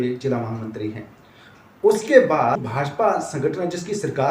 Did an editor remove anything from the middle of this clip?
yes; 1 cut; at 2.6 s

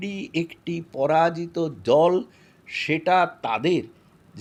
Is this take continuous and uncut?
yes; 0 cuts

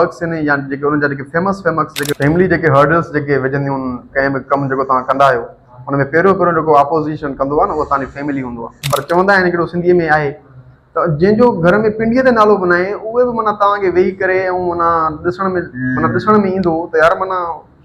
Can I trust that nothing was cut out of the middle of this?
no; 2 cuts; at 2.1 s, 8.8 s

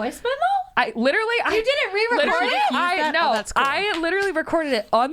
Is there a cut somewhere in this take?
no; 0 cuts

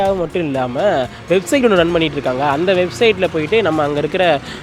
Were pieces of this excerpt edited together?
no; 0 cuts

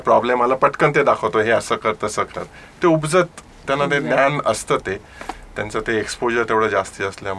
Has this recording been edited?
no; 0 cuts

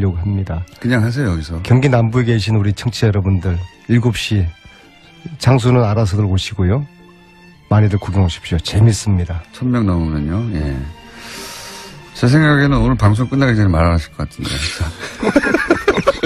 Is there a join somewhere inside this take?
no; 0 cuts

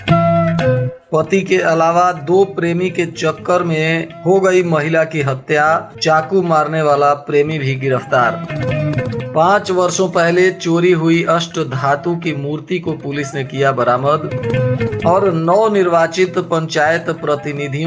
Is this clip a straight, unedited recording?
no; 1 cut; at 0.9 s

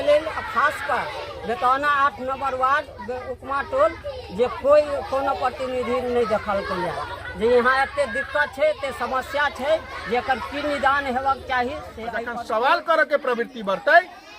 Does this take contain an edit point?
yes; 1 cut; at 12.3 s

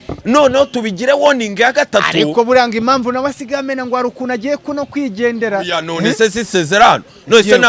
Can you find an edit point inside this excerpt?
no; 0 cuts

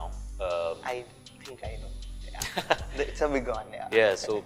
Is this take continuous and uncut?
yes; 0 cuts

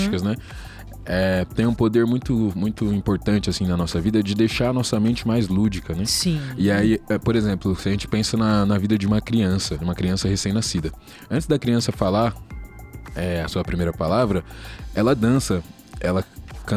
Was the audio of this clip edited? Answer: no; 0 cuts

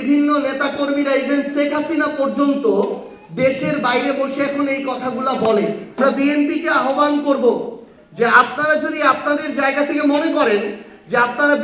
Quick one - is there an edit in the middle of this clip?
yes; 1 cut; at 6.0 s

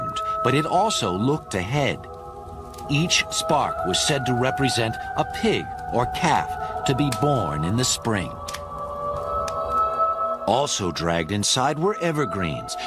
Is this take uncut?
no; 1 cut; at 9.4 s

